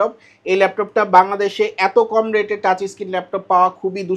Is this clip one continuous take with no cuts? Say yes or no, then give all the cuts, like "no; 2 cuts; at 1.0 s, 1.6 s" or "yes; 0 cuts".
yes; 0 cuts